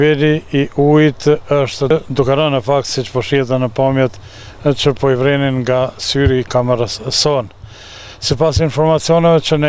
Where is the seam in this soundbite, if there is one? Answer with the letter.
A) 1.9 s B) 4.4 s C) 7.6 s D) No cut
A